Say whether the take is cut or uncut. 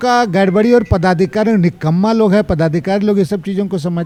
uncut